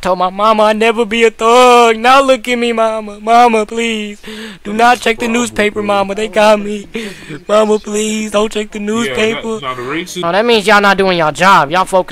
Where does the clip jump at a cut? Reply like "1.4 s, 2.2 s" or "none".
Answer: 10.1 s